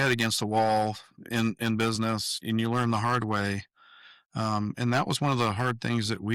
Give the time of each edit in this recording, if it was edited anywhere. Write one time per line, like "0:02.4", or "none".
none